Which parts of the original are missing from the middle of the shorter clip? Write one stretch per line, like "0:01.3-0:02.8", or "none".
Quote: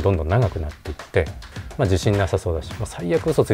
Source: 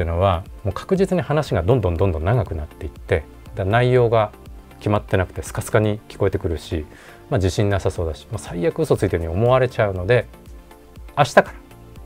0:03.4-0:07.0